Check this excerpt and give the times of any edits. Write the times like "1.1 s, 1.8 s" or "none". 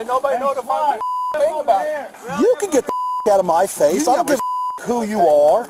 2.2 s